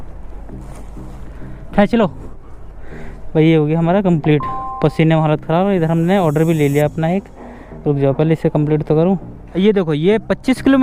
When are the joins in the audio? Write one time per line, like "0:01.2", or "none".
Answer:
0:09.4